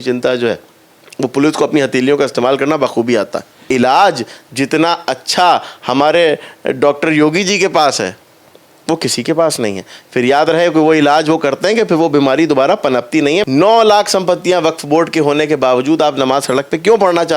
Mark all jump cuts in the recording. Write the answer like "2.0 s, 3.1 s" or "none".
3.7 s, 13.4 s